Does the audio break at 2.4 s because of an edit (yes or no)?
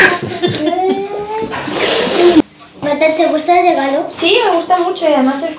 yes